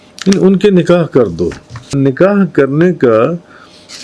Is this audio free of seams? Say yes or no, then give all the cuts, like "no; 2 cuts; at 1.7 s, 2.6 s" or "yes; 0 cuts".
no; 1 cut; at 1.9 s